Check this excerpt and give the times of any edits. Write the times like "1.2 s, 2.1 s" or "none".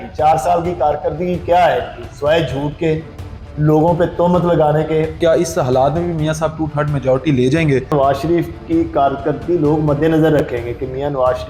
5.2 s, 7.9 s